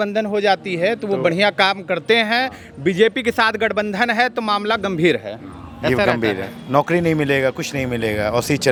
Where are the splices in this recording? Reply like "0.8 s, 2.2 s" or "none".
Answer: none